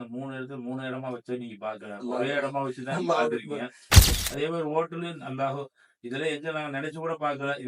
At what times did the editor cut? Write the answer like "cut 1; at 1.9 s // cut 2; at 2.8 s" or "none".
cut 1; at 4.0 s